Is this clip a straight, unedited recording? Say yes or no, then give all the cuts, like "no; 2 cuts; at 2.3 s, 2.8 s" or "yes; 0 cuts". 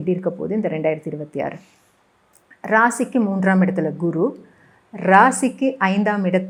yes; 0 cuts